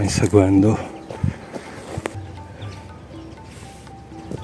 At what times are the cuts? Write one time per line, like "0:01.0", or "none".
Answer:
0:02.2